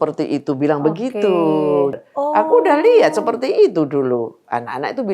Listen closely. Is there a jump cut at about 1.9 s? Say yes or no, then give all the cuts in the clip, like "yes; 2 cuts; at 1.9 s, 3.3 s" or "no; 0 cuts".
yes; 1 cut; at 1.9 s